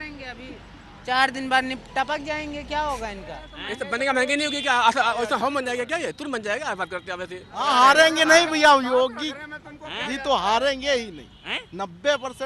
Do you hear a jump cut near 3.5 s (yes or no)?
yes